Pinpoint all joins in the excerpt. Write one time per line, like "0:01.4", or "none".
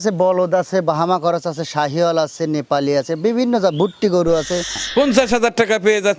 0:04.8

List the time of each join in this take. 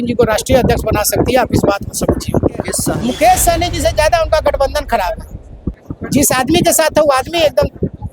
0:02.8

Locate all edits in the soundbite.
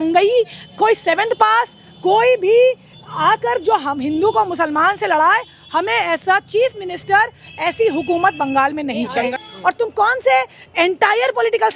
0:09.3

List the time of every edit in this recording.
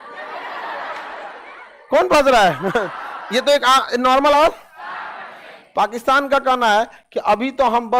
0:04.4

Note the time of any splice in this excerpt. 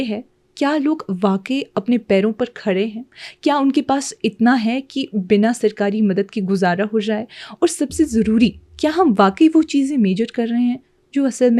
none

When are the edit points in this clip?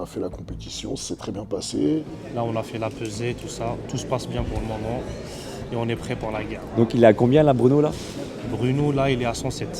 0:02.0

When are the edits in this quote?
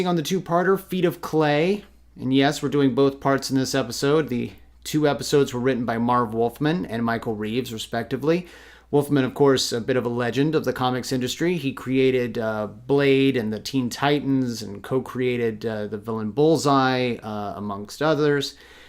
0:12.7

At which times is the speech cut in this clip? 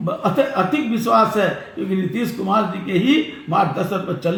none

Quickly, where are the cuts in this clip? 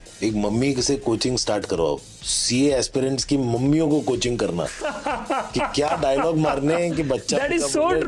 none

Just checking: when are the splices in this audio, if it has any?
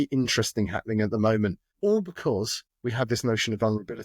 0:01.7
0:02.6

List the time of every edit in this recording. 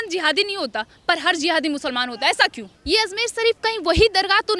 0:02.7

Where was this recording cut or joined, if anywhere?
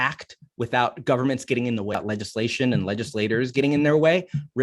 0:01.9

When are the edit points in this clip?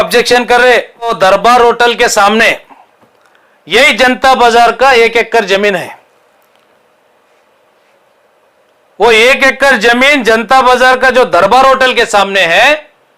0:01.1

